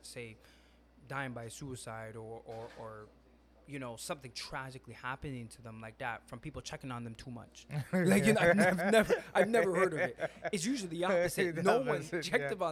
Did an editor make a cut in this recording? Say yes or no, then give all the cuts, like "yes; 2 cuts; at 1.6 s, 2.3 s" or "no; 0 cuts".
no; 0 cuts